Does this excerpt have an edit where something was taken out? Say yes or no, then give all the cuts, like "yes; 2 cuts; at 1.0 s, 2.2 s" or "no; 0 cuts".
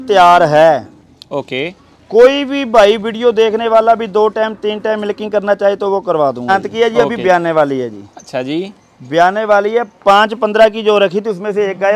yes; 1 cut; at 6.5 s